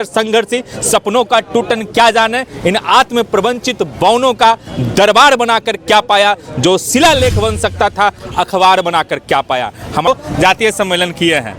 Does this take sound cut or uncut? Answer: cut